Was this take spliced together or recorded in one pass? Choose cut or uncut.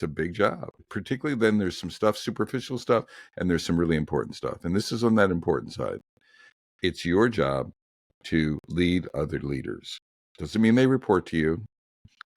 cut